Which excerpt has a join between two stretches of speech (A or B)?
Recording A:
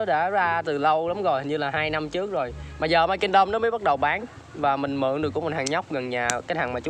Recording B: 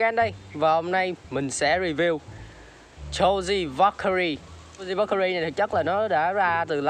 B